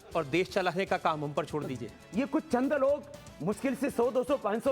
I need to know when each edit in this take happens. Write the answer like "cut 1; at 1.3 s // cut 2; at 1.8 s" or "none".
cut 1; at 2.0 s